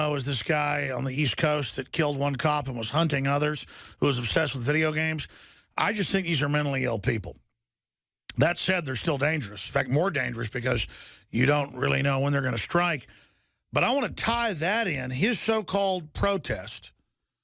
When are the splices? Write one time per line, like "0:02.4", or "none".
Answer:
0:05.2